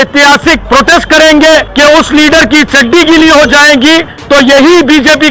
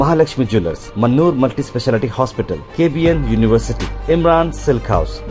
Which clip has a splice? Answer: first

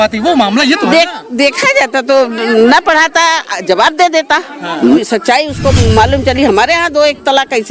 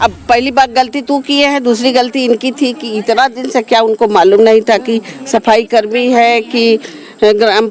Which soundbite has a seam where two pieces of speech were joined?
first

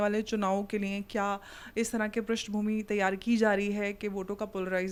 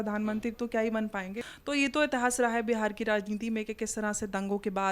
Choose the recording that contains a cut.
second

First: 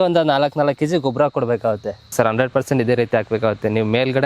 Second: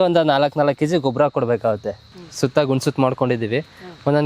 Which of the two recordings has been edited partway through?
first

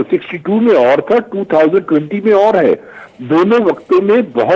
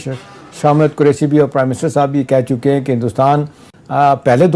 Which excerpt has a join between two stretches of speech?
second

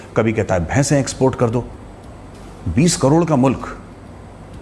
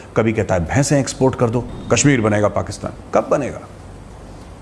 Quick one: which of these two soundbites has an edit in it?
second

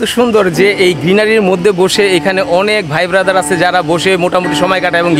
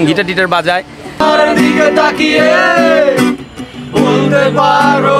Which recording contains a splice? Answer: second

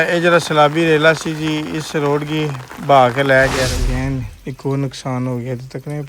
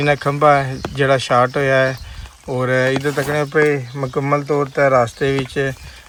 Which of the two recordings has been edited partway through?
first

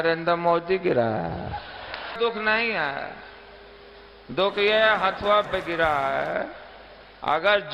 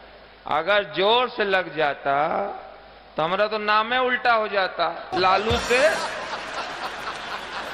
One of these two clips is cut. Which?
first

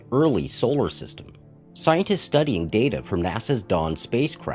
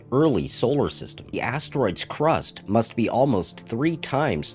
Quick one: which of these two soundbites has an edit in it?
first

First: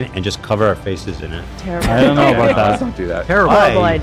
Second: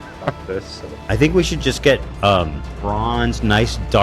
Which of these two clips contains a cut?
second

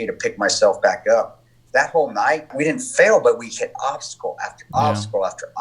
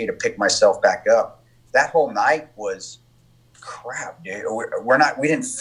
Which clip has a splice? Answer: first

